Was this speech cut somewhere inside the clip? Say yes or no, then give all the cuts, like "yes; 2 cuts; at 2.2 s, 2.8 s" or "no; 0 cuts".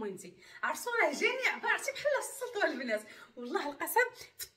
no; 0 cuts